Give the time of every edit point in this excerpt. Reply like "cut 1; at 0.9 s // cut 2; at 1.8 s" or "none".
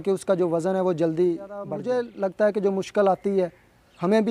cut 1; at 1.7 s